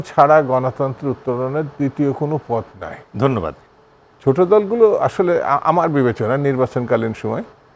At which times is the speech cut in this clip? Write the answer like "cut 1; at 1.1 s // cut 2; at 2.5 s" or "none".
cut 1; at 3.6 s